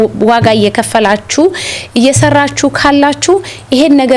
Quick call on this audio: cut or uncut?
uncut